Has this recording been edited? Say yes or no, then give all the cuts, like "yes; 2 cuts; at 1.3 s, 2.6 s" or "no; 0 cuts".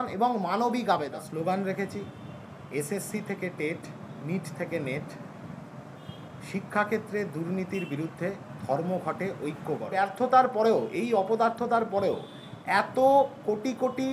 yes; 2 cuts; at 1.2 s, 9.9 s